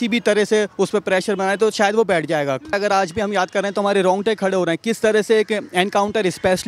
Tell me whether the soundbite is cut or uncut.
cut